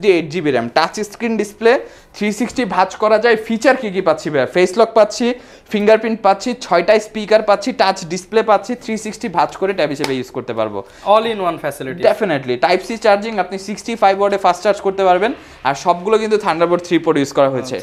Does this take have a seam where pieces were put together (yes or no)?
no